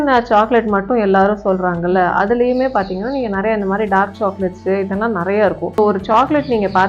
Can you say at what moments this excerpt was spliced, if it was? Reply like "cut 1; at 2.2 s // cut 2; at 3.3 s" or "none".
cut 1; at 5.7 s